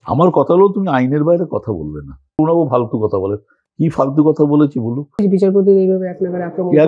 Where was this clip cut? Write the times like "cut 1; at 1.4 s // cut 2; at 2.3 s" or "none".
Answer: cut 1; at 2.4 s // cut 2; at 5.2 s